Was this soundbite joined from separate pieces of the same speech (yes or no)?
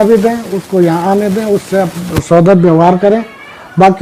no